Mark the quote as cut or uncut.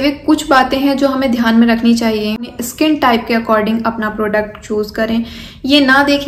uncut